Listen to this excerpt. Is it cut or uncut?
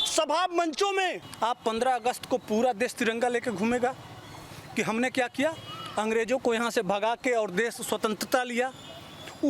cut